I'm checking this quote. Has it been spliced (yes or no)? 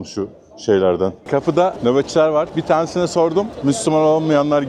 yes